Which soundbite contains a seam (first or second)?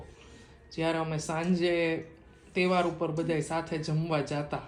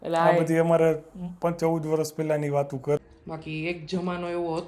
second